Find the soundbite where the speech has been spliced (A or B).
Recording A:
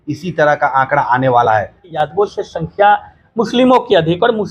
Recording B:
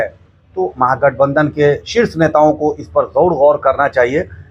A